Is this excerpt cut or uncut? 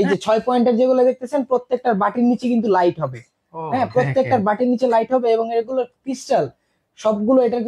uncut